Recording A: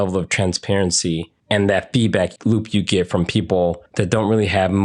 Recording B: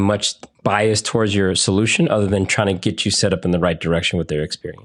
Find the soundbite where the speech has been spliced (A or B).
A